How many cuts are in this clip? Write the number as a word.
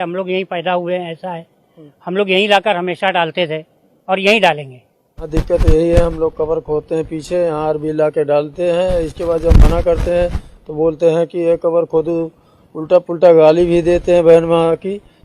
one